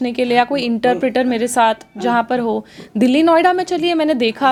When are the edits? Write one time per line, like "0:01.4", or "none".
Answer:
none